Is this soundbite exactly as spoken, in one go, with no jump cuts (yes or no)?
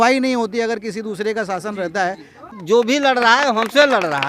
no